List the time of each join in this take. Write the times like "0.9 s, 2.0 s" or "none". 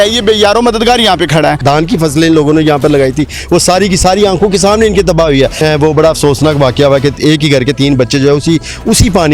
1.6 s, 5.6 s